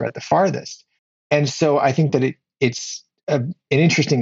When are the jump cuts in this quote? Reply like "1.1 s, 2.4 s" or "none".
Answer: 1.1 s

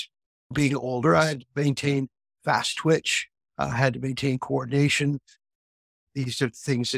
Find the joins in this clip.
none

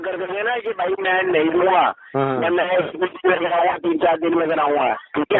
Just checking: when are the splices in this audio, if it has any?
none

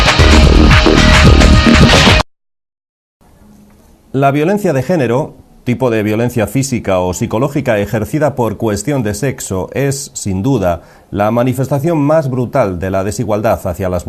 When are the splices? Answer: 2.2 s

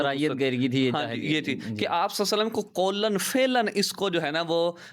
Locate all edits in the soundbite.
none

